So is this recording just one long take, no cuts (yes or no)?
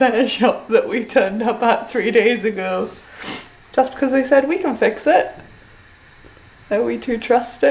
yes